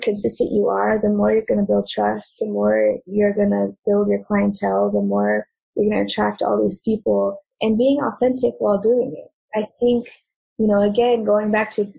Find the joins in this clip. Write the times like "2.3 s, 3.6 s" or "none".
7.5 s, 9.4 s